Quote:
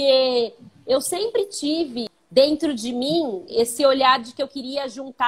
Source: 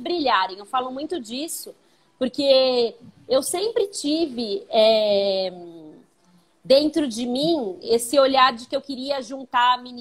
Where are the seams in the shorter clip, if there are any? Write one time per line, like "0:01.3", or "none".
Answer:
0:02.1